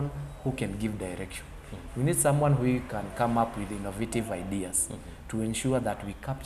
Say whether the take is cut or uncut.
uncut